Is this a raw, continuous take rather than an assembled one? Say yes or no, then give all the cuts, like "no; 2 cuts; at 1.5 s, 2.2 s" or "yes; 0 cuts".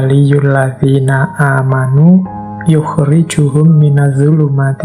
yes; 0 cuts